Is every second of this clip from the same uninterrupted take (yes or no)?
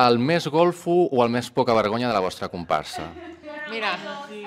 yes